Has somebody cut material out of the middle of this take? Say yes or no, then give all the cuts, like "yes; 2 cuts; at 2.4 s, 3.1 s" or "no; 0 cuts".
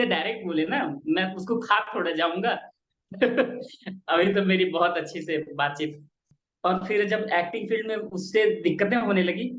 yes; 1 cut; at 6.3 s